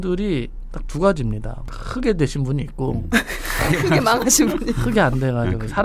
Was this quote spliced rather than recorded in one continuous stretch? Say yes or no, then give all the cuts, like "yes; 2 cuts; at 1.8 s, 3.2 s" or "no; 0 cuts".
no; 0 cuts